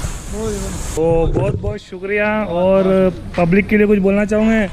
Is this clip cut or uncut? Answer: cut